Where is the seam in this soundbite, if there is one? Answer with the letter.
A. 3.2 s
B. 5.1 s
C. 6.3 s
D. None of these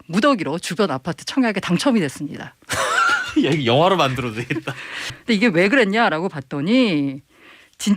B